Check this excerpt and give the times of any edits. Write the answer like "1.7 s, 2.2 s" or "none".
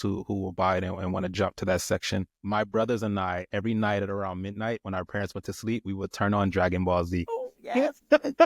2.3 s